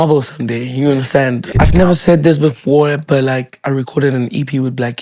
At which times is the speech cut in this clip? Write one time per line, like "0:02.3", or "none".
0:01.5